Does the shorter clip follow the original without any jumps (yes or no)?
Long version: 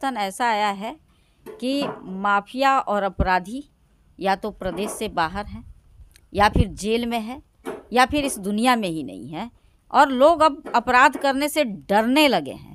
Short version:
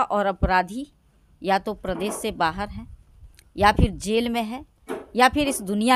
yes